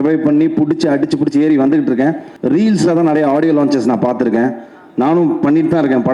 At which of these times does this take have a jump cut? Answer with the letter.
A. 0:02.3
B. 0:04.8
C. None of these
A